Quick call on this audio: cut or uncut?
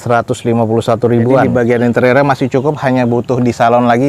cut